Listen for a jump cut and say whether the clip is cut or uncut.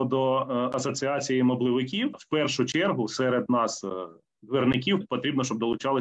cut